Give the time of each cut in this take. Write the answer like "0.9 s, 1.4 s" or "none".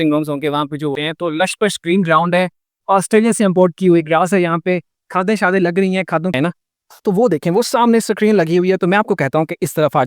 1.0 s, 6.3 s